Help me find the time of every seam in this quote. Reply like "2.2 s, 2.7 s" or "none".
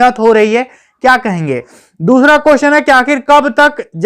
1.8 s